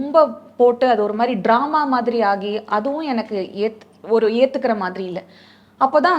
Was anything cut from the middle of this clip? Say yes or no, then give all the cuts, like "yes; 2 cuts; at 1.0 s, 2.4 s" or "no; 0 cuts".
no; 0 cuts